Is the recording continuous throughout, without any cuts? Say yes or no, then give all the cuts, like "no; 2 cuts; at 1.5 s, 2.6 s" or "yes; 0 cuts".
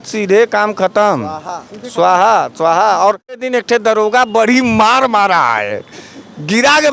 no; 1 cut; at 3.5 s